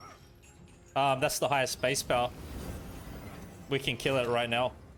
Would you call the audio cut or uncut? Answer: uncut